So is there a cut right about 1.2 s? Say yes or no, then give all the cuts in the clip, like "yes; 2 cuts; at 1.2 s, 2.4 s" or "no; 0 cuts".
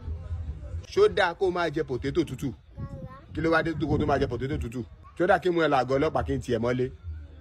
no; 0 cuts